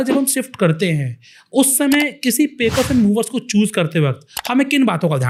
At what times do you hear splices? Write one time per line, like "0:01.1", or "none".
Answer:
none